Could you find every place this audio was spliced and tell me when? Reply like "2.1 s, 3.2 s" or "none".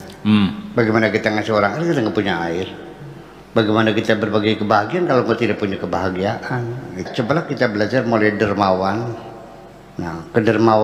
7.0 s